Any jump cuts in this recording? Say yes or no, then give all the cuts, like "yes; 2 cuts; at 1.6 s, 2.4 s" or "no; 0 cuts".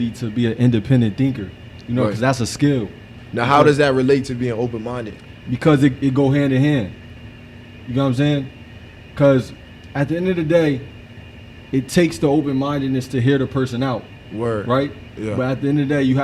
no; 0 cuts